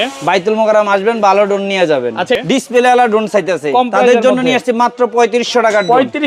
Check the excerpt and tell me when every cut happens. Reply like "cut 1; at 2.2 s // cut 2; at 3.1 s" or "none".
cut 1; at 2.4 s